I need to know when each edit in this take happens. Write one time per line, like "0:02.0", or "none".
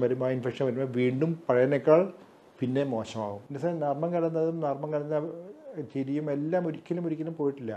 0:03.4